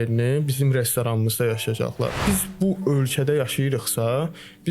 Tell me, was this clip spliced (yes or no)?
yes